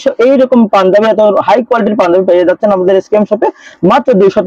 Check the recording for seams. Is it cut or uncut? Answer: uncut